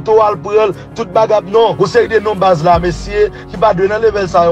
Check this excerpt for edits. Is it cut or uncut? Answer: cut